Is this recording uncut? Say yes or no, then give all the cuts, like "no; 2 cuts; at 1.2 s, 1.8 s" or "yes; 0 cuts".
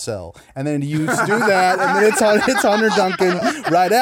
yes; 0 cuts